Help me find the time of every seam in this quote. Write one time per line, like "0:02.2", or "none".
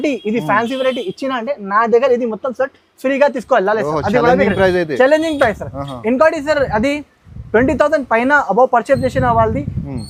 none